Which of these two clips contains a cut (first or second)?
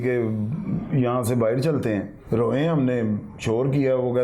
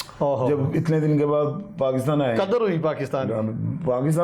first